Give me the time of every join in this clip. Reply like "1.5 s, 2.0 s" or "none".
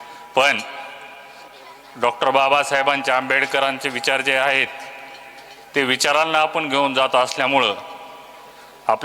none